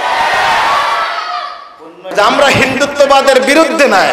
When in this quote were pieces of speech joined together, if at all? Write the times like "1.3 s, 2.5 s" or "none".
2.1 s